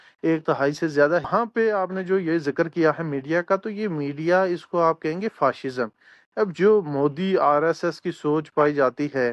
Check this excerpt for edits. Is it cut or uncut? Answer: cut